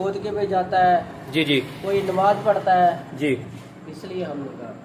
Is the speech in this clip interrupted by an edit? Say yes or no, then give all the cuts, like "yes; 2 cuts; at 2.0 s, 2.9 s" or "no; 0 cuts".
no; 0 cuts